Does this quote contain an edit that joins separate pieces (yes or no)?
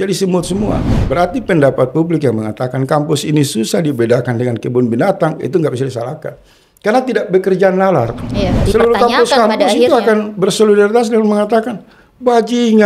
yes